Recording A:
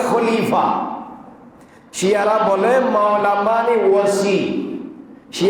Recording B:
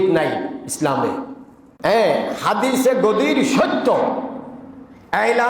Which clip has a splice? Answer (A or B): B